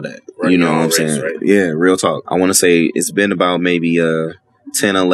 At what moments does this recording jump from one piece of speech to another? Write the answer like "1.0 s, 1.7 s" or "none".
2.2 s